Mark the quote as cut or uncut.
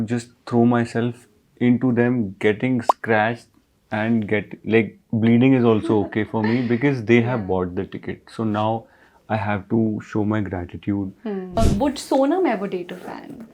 cut